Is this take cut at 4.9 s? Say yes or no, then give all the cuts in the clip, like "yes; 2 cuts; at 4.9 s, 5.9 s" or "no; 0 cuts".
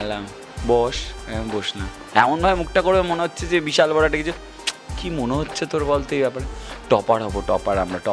no; 0 cuts